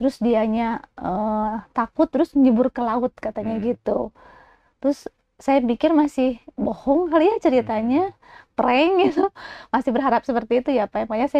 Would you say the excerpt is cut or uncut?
uncut